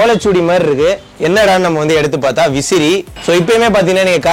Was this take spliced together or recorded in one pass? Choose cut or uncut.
cut